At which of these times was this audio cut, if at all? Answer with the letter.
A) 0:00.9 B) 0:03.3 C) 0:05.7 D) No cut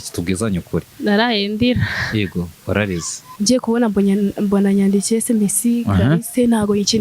B